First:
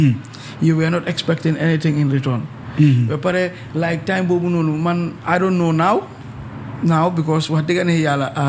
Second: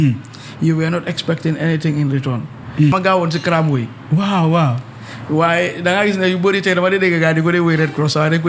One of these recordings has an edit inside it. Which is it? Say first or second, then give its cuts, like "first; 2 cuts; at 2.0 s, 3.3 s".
second; 1 cut; at 2.9 s